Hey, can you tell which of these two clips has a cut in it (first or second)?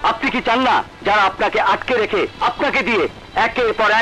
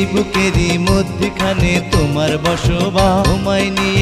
first